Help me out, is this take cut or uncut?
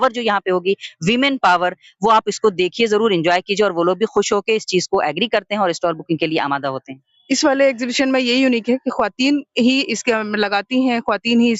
uncut